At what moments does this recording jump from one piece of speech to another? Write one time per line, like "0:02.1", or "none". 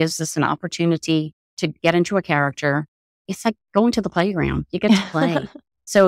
0:03.1